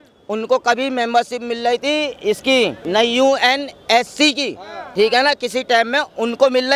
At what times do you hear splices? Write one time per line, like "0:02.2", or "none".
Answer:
none